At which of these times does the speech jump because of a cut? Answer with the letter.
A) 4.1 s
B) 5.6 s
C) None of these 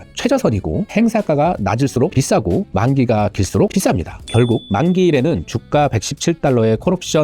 A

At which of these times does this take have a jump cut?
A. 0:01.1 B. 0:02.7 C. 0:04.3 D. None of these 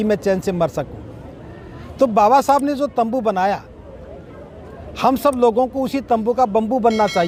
D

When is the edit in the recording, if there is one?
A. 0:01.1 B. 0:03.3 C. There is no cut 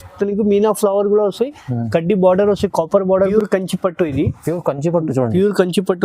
B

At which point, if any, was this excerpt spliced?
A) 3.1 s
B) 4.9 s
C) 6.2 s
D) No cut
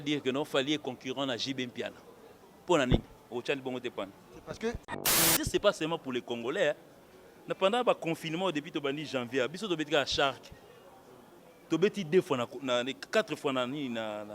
B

